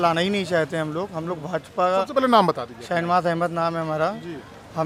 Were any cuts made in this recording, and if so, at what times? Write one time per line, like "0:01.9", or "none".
none